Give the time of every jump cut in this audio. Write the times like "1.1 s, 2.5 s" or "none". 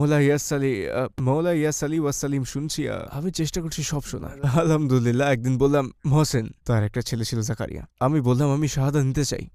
none